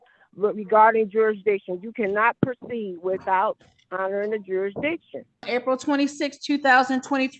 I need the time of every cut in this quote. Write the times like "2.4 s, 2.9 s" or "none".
5.5 s